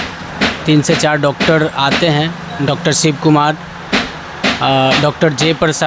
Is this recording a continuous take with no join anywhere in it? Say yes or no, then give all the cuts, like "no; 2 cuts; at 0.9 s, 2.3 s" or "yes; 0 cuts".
yes; 0 cuts